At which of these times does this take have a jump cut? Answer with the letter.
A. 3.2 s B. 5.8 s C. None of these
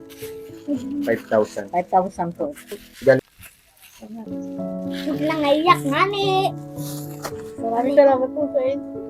A